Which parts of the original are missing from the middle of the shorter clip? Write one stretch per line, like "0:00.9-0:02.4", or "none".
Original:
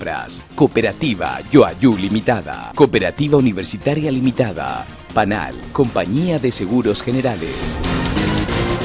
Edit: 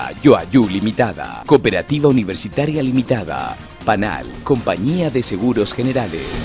none

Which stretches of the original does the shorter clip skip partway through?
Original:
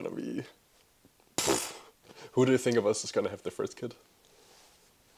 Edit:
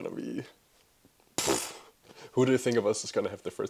none

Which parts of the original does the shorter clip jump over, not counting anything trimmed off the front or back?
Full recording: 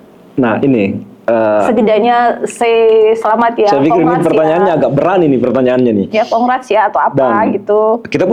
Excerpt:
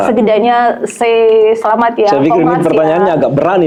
none

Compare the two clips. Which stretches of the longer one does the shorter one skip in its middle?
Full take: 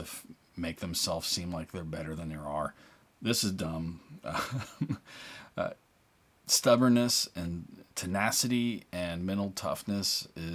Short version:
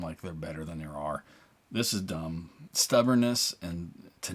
0:04.1-0:06.3

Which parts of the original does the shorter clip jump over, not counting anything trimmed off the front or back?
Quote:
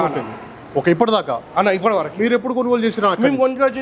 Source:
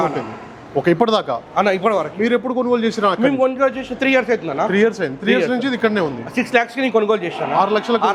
none

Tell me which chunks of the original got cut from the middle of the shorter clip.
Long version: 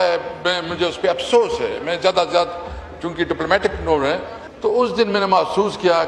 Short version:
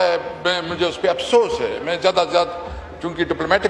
none

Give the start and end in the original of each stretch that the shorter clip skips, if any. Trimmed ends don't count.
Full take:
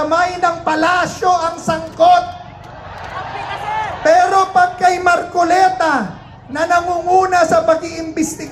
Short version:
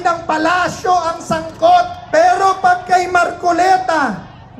0:02.4-0:03.9

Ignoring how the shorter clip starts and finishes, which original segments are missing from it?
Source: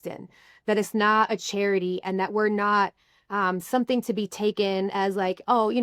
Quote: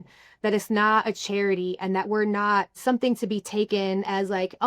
0:03.0-0:03.6

